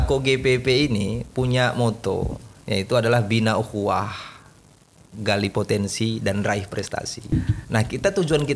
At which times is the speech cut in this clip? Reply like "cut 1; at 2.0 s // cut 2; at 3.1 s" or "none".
cut 1; at 2.5 s // cut 2; at 7.3 s